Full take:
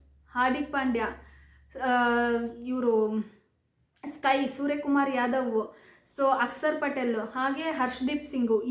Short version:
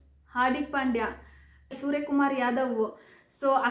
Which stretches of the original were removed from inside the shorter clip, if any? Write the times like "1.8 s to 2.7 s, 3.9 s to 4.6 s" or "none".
1.8 s to 4.5 s

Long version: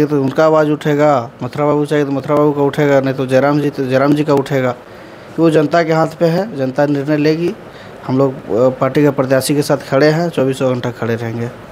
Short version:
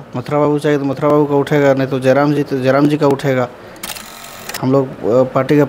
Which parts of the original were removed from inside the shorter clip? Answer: 5.3 s to 7.5 s

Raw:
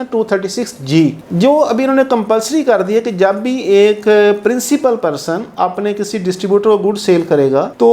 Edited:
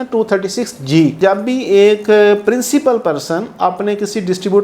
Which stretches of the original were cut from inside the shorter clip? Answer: 1.2 s to 3.1 s

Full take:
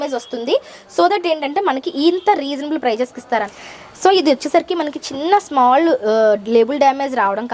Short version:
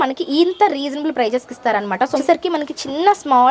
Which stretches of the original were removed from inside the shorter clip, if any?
3.8 s to 4.4 s

